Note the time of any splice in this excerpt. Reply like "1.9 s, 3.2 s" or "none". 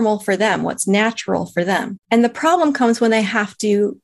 1.9 s